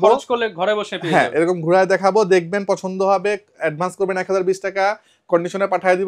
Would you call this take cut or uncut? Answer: uncut